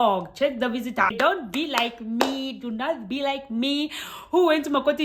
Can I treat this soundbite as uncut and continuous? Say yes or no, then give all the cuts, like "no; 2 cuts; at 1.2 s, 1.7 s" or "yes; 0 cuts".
no; 1 cut; at 1.1 s